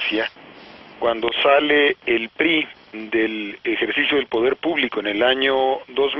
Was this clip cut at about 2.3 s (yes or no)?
no